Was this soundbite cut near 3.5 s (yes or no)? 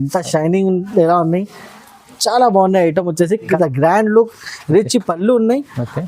yes